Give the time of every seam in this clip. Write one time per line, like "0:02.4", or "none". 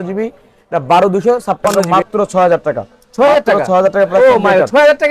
0:01.8